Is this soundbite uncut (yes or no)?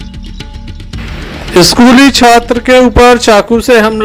no